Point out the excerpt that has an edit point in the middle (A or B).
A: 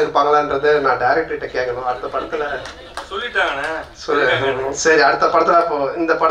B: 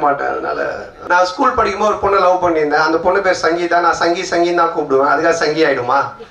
B